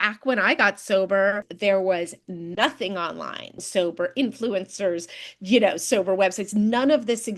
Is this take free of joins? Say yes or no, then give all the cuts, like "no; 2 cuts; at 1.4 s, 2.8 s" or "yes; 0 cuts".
no; 2 cuts; at 1.5 s, 3.6 s